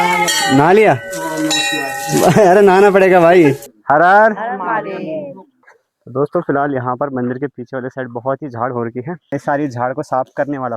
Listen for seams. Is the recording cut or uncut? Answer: cut